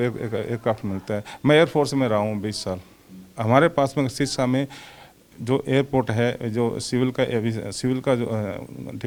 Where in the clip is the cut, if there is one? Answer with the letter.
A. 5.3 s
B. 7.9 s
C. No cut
C